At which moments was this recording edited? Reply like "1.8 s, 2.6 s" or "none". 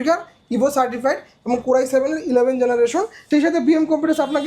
3.2 s